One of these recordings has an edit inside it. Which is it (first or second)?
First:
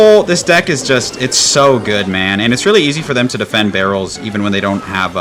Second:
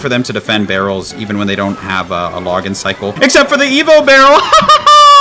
second